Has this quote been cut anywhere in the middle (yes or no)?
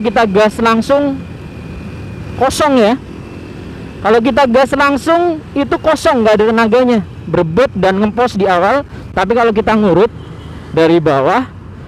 no